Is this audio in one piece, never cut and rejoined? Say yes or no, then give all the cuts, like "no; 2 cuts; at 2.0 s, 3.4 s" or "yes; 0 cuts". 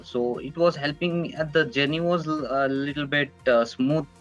yes; 0 cuts